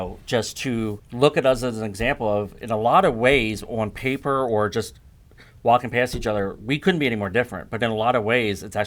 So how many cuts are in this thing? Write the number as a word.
one